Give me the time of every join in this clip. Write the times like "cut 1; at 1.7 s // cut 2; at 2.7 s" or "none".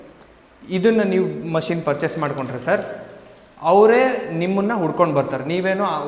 none